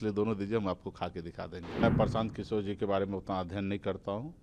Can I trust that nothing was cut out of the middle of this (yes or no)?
no